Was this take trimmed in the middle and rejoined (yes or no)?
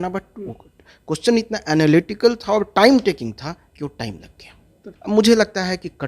yes